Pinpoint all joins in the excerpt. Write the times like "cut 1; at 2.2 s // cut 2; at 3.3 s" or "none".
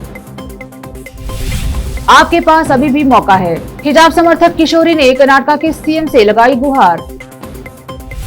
cut 1; at 0.9 s